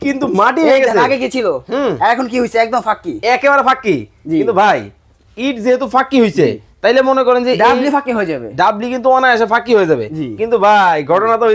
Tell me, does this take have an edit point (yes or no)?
no